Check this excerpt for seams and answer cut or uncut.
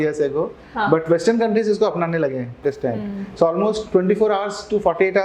cut